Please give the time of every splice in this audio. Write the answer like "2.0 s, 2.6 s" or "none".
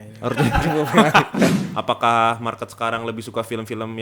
1.7 s